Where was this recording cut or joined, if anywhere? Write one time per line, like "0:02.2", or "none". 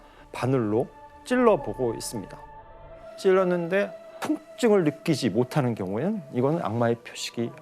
0:03.1